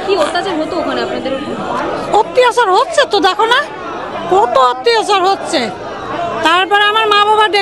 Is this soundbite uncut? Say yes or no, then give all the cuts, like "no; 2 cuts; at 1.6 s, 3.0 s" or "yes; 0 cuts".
yes; 0 cuts